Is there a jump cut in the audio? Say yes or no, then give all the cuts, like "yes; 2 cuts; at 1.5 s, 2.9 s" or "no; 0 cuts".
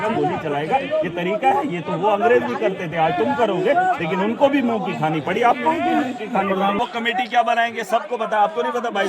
yes; 1 cut; at 6.8 s